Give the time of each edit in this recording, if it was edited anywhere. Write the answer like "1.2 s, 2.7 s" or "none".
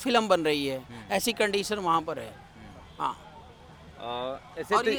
none